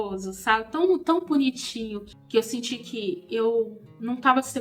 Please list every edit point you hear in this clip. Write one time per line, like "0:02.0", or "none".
0:02.1